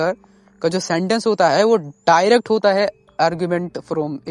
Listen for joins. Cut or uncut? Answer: uncut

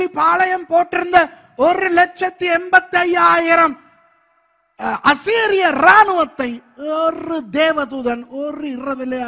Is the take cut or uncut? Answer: uncut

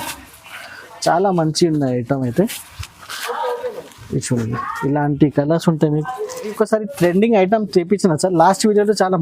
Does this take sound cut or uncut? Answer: cut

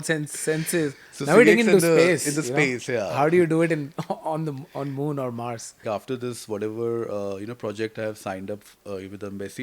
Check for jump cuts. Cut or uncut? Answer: cut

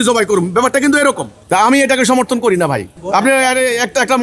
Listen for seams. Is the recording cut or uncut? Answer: cut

